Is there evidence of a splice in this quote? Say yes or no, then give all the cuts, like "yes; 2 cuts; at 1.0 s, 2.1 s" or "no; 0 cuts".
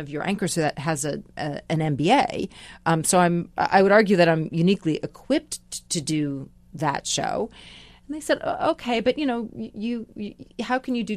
no; 0 cuts